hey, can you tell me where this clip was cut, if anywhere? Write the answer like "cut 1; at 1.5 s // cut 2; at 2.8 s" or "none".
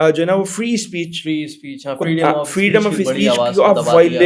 none